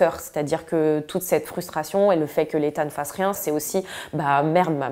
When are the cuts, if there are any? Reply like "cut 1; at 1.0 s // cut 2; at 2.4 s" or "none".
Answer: cut 1; at 3.4 s